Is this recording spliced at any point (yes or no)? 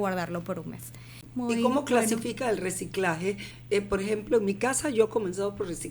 yes